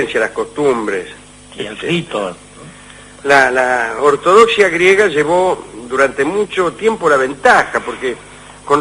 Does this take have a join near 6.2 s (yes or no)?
yes